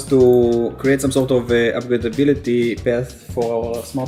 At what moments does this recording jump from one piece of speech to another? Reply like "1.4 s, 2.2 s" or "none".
none